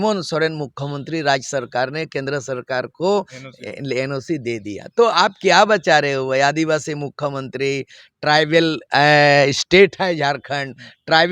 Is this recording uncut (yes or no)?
yes